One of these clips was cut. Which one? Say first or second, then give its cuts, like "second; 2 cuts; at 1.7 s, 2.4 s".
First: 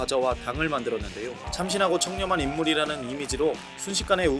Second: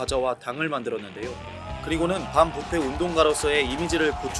first; 1 cut; at 1.4 s